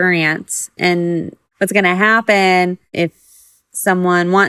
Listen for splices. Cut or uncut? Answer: cut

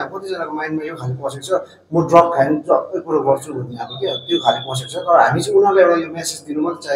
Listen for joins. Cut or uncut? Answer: uncut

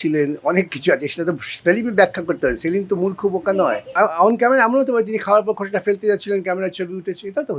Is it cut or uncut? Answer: cut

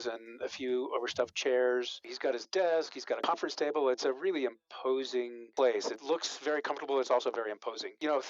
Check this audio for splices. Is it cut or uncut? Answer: uncut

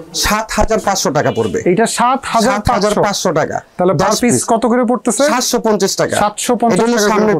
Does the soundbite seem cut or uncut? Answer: uncut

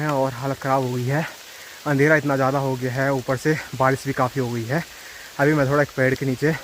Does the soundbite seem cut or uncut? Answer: uncut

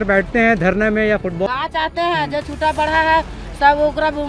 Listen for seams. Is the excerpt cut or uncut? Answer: cut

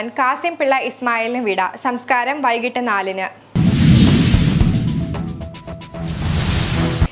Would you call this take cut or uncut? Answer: cut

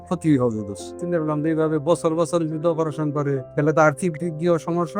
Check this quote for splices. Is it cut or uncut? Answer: cut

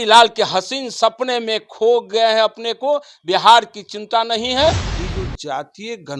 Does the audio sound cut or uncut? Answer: cut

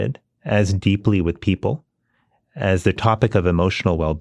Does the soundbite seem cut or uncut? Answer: uncut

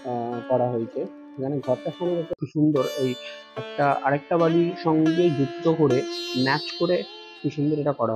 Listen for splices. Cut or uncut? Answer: cut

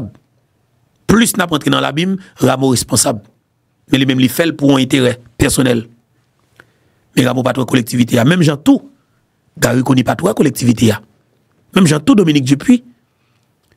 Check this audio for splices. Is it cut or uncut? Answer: uncut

